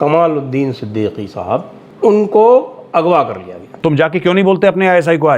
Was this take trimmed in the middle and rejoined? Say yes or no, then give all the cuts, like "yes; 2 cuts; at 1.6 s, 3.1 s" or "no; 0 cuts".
yes; 2 cuts; at 1.8 s, 3.7 s